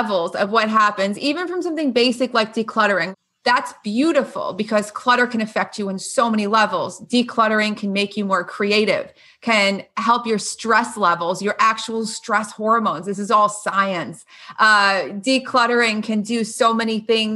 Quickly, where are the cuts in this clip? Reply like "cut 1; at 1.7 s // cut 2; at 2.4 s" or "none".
cut 1; at 3.1 s

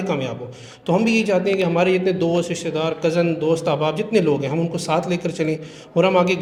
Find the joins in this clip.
none

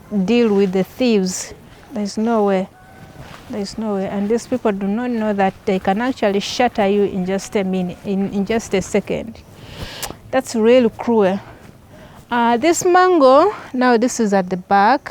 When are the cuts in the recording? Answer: none

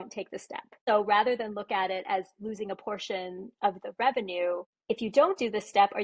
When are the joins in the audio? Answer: cut 1; at 0.9 s // cut 2; at 4.7 s

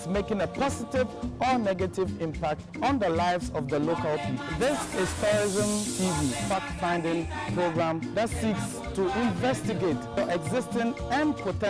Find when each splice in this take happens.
cut 1; at 0.9 s

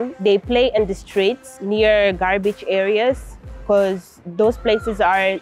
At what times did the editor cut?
cut 1; at 1.5 s

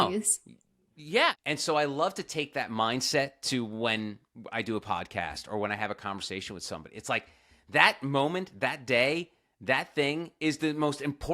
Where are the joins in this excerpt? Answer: cut 1; at 1.4 s

